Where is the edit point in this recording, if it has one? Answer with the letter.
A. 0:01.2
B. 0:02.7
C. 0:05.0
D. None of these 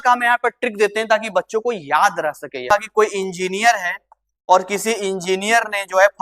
B